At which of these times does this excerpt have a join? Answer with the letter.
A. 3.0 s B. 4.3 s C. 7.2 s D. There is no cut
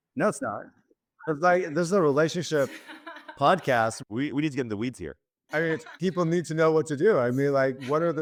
D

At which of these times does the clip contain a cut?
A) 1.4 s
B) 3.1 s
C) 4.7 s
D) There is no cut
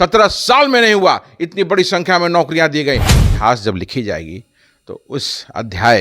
B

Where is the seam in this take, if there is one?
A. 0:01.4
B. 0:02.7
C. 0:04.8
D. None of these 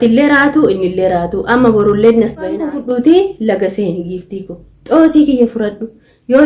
B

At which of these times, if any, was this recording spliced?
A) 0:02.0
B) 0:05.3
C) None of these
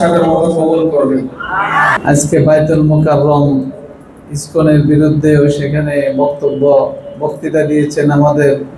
A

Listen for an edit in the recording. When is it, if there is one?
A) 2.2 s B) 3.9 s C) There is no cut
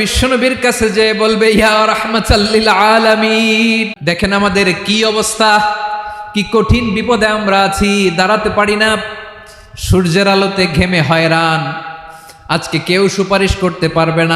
B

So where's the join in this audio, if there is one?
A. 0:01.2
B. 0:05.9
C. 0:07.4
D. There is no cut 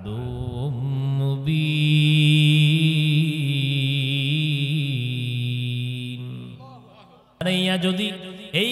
C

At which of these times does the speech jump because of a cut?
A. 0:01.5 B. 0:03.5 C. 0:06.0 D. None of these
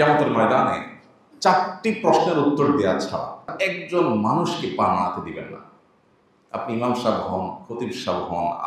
B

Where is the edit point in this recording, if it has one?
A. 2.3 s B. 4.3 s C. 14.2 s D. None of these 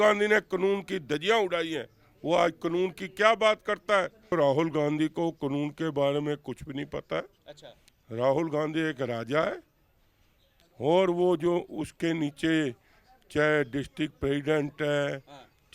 B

